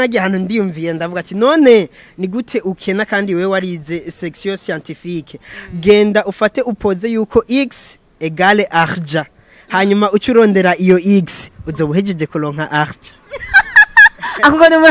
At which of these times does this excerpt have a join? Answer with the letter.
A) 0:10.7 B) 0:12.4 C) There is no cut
C